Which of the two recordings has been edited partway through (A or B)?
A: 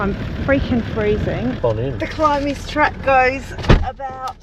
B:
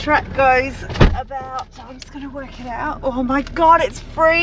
A